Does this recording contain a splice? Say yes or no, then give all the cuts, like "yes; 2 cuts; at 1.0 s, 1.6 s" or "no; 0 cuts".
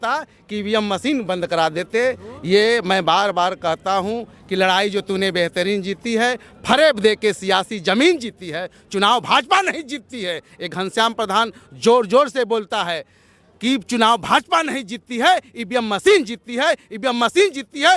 no; 0 cuts